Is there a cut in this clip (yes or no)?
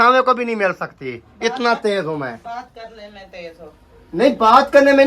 no